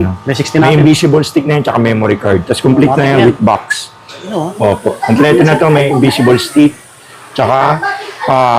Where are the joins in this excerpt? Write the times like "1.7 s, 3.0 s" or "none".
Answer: 4.3 s